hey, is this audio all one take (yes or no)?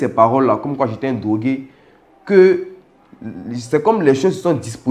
yes